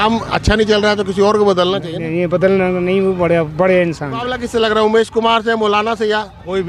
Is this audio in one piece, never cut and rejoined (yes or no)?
no